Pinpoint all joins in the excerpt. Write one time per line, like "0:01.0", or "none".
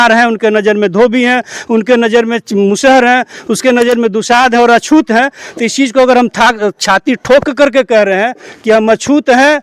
none